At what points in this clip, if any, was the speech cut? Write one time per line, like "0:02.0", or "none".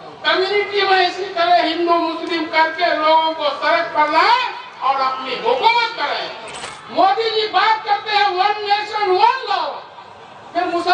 0:06.7